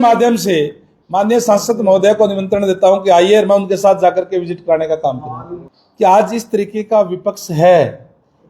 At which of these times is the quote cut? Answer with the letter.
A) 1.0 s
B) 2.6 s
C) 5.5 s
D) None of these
C